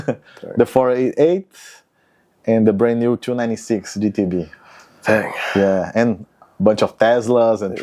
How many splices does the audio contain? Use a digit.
0